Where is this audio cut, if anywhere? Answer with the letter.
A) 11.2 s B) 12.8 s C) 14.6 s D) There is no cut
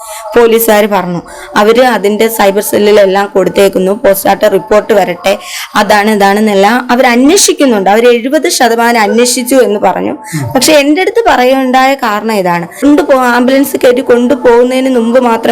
B